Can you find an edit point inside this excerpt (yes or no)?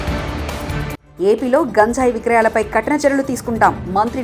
no